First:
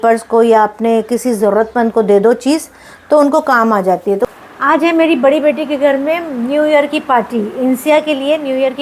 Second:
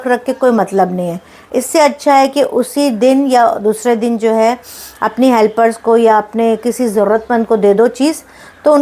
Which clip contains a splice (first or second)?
first